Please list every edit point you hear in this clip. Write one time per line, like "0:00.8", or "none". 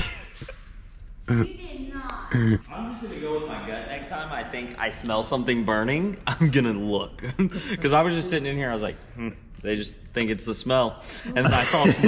0:02.7